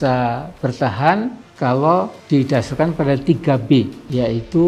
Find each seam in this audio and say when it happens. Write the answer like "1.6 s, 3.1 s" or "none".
none

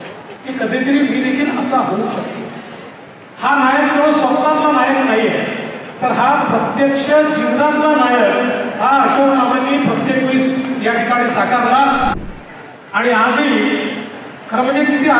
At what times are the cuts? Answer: 12.2 s

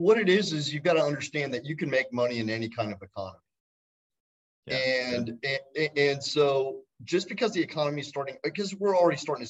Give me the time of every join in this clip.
none

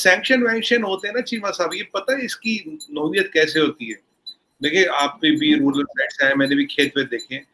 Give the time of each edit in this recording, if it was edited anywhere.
none

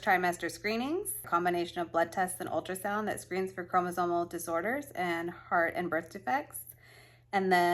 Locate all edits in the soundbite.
1.2 s

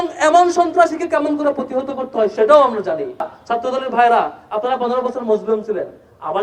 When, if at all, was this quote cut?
3.3 s

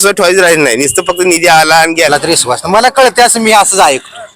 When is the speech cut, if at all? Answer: 2.1 s

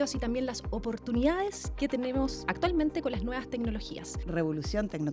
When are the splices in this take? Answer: 1.6 s, 2.4 s, 4.2 s

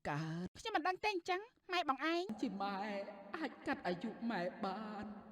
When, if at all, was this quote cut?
2.3 s

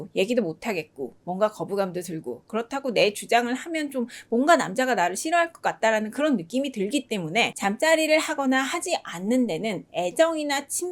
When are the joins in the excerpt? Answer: 7.5 s

